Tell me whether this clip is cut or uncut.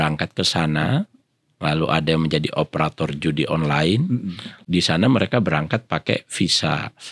cut